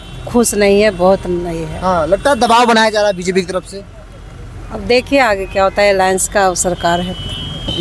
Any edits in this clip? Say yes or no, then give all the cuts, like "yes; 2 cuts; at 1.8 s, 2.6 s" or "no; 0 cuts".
no; 0 cuts